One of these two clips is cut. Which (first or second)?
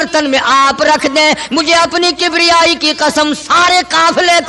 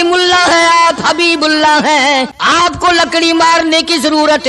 second